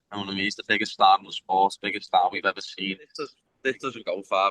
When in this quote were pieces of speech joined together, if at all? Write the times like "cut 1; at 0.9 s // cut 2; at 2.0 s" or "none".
cut 1; at 3.5 s